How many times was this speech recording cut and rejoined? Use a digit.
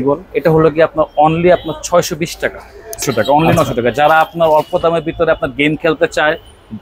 1